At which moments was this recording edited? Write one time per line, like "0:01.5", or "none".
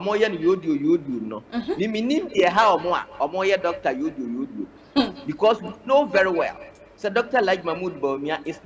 none